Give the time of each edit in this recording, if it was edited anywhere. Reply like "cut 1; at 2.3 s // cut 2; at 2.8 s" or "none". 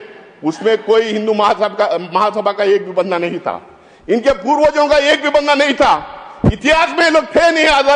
none